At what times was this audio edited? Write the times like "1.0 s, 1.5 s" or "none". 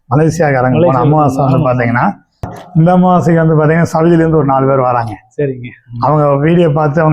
2.6 s